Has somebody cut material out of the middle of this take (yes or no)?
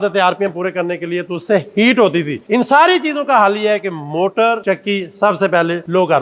yes